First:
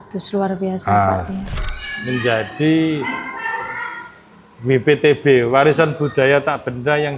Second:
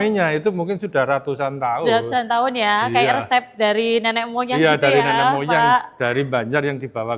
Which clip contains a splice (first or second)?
first